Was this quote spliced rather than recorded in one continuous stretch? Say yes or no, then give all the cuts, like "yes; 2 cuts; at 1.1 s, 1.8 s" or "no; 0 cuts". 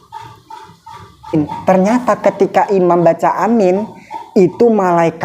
yes; 1 cut; at 1.3 s